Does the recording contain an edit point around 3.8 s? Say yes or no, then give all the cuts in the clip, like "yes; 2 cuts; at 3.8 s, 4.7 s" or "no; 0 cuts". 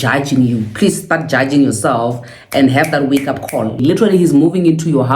yes; 1 cut; at 3.8 s